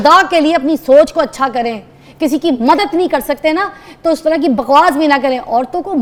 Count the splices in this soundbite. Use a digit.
0